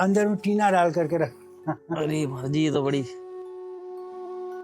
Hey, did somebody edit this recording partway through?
no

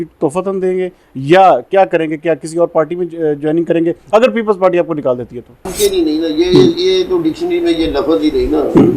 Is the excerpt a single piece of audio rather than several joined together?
no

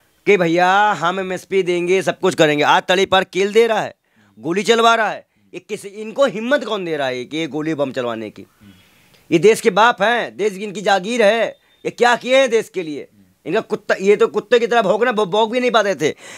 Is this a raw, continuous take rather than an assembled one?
yes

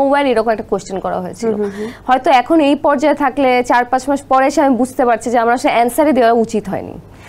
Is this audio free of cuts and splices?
yes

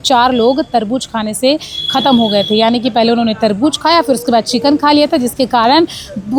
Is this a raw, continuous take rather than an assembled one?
yes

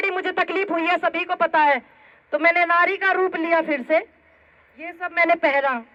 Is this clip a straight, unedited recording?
yes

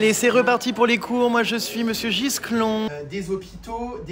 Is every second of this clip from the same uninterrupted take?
no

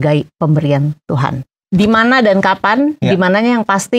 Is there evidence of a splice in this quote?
yes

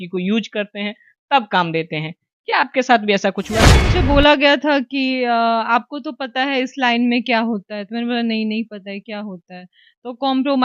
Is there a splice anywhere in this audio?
yes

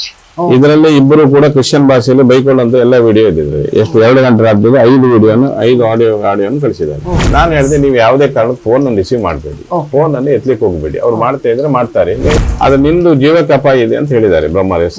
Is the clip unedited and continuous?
no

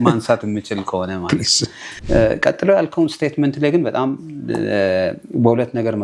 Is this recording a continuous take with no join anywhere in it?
no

